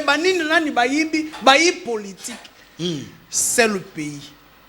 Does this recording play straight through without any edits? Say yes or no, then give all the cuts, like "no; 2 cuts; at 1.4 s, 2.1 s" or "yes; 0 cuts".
yes; 0 cuts